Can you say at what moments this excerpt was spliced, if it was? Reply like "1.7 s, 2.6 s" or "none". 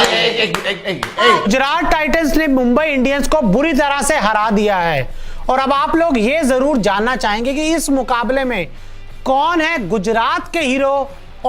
1.5 s